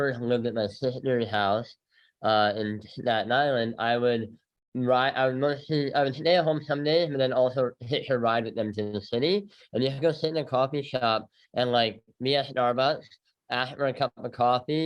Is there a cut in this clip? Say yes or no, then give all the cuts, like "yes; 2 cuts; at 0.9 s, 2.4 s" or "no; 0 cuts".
no; 0 cuts